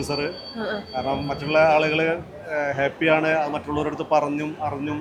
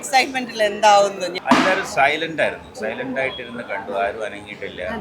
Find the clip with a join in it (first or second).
second